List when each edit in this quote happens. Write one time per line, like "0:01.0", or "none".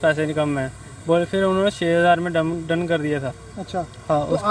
none